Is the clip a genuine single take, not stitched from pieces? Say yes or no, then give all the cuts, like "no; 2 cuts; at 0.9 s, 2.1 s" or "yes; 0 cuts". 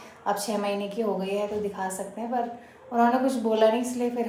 yes; 0 cuts